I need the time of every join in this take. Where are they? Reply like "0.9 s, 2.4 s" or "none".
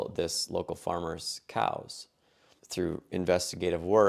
2.4 s